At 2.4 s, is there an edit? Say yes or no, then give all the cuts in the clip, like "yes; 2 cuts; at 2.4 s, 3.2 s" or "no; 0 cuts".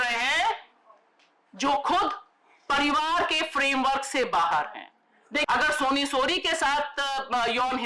no; 1 cut; at 5.4 s